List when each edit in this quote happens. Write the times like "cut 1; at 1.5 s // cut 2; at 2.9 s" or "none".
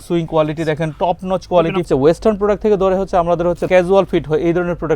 cut 1; at 1.8 s // cut 2; at 3.7 s